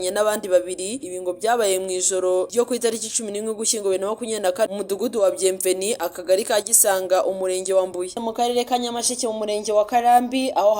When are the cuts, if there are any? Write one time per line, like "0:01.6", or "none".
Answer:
0:08.2

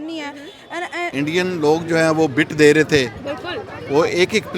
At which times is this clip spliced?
0:01.0

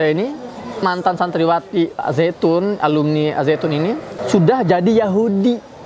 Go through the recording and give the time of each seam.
0:00.8
0:04.1

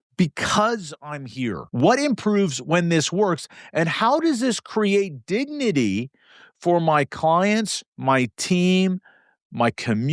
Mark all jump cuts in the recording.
0:01.6

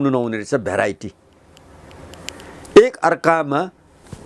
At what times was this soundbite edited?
none

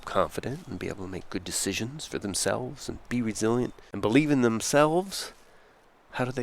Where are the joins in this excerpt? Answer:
0:03.8

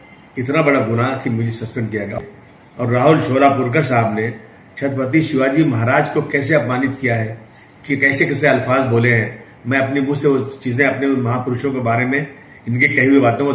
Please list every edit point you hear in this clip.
0:02.2

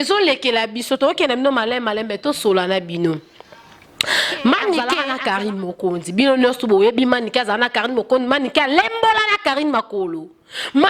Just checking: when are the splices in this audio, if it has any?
0:05.0

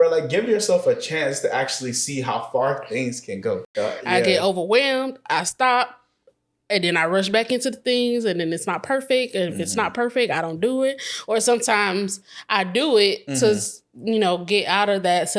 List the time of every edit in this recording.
0:03.7

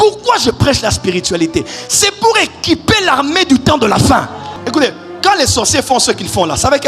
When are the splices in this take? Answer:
0:04.6

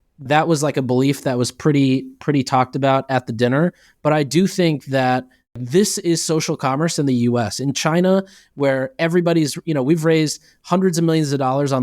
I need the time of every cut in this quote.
0:05.5

